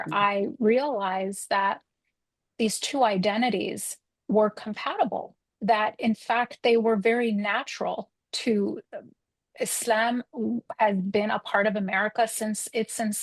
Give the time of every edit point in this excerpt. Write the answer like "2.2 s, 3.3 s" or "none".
none